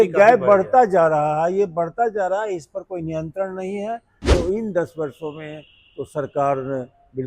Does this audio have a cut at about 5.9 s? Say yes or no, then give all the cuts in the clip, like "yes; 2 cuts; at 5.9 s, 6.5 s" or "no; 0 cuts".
no; 1 cut; at 4.2 s